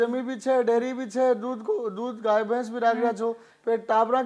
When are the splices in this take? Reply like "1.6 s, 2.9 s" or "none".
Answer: none